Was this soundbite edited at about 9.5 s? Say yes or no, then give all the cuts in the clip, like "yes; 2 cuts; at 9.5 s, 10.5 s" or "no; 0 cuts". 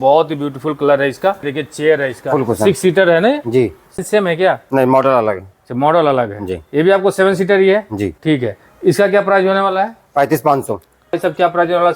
no; 4 cuts; at 1.5 s, 4.0 s, 8.1 s, 11.2 s